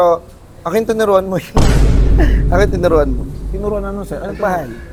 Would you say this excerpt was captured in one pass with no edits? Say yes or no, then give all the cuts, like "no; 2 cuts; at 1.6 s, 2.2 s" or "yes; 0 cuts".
yes; 0 cuts